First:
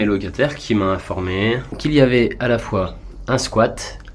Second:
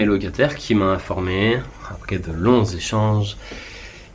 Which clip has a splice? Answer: first; 1 cut; at 1.8 s

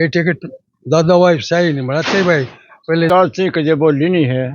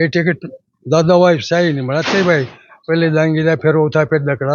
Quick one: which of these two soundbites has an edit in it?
first; 1 cut; at 3.1 s

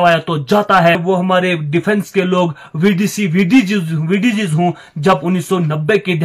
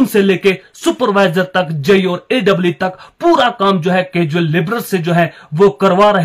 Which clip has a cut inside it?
first; 1 cut; at 1.0 s

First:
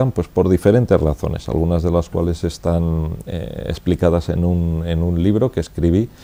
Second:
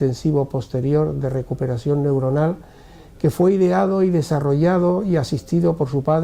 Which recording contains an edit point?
second; 1 cut; at 1.4 s

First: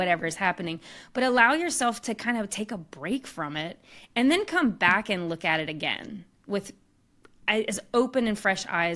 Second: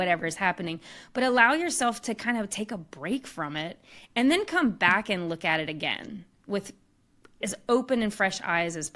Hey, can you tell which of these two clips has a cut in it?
second; 1 cut; at 7.4 s

